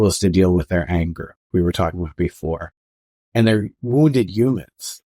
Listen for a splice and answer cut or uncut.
uncut